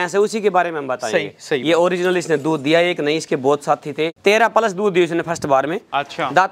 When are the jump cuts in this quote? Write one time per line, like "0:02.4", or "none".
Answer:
0:04.1